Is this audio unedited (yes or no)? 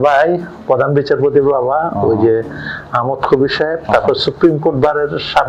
yes